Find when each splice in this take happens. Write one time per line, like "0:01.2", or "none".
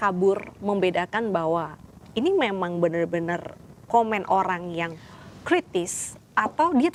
none